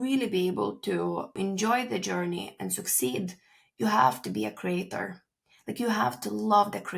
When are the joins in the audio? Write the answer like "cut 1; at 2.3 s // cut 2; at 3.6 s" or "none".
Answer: cut 1; at 1.4 s